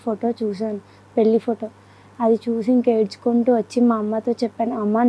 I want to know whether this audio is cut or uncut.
uncut